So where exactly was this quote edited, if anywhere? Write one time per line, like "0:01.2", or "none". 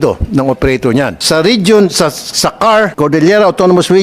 0:01.2
0:02.9